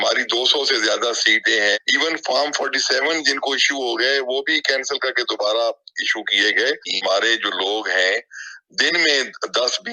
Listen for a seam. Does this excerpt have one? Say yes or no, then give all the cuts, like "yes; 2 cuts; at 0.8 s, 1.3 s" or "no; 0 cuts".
yes; 2 cuts; at 1.8 s, 6.9 s